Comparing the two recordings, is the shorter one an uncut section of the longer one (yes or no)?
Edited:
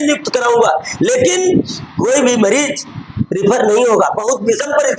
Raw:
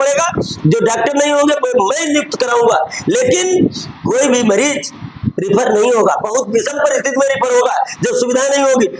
yes